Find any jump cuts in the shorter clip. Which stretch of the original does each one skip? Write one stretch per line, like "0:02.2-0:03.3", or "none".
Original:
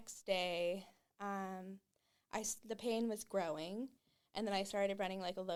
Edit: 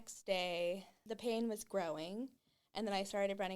0:01.0-0:02.6